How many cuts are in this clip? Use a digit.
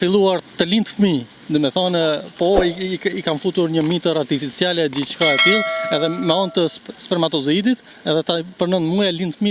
0